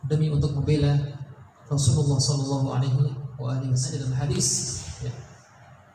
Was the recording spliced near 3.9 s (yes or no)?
yes